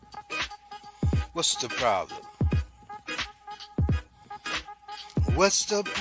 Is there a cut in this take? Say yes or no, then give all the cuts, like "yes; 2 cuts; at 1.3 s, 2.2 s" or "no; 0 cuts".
no; 0 cuts